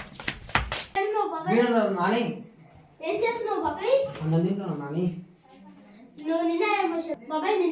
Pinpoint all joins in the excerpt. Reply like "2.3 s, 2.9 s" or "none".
0.9 s